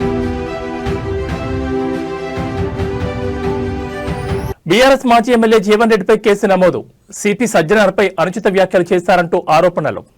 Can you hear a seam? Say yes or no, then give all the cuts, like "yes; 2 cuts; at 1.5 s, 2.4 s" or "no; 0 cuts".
yes; 1 cut; at 4.1 s